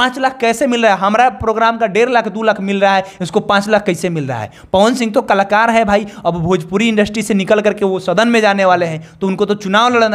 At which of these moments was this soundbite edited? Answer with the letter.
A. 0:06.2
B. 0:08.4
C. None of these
C